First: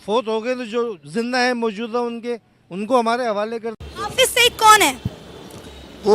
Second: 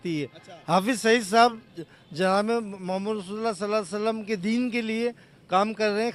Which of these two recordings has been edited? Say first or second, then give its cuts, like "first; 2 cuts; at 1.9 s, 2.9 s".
first; 1 cut; at 3.8 s